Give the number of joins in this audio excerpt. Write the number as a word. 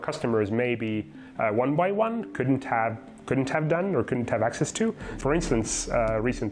one